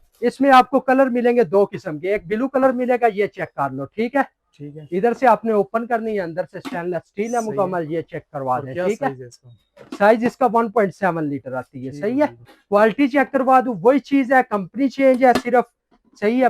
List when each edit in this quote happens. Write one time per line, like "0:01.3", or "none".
0:12.5